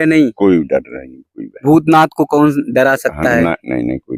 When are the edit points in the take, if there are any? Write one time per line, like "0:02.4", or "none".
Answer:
none